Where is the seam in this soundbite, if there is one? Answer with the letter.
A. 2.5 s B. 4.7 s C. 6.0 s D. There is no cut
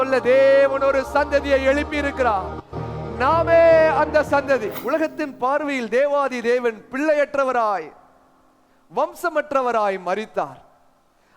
B